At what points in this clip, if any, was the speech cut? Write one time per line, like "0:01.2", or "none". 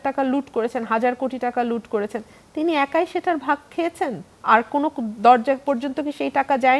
none

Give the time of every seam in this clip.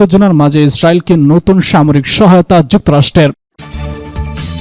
0:03.4

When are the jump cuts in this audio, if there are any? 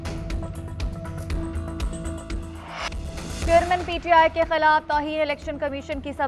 0:02.9

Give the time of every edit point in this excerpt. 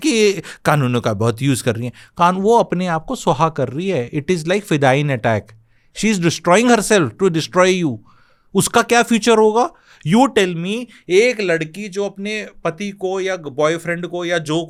none

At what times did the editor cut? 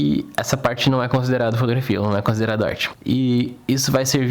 0:02.9

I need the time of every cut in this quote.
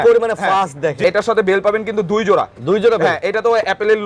0:01.0

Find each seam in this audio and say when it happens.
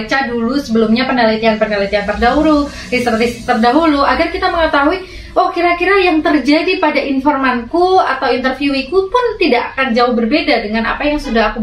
none

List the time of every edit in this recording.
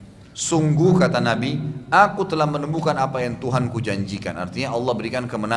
none

